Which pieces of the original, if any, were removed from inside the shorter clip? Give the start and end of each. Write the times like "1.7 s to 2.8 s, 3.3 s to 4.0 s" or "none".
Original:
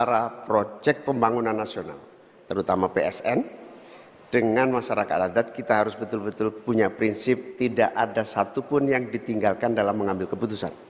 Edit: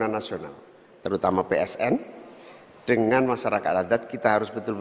none